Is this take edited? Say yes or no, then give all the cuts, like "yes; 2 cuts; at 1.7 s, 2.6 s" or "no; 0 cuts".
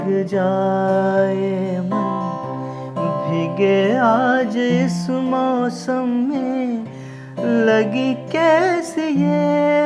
no; 0 cuts